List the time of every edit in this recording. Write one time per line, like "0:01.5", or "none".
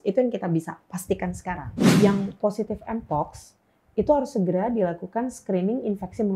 0:02.0